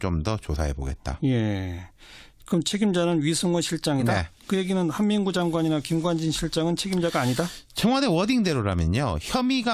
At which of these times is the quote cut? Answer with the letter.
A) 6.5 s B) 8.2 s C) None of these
B